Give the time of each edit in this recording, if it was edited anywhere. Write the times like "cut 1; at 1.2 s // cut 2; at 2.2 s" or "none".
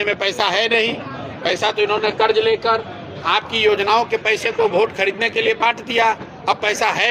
none